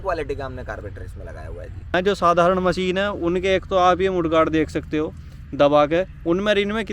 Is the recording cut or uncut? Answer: cut